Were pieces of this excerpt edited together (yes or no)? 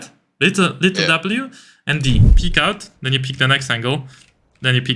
yes